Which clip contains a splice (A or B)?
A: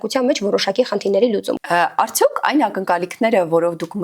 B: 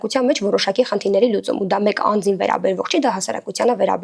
A